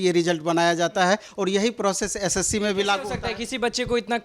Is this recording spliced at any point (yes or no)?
no